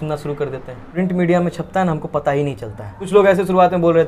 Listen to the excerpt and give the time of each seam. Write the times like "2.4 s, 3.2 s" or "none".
0.9 s, 3.0 s